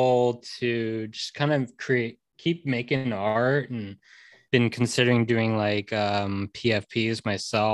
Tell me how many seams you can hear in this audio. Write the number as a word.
one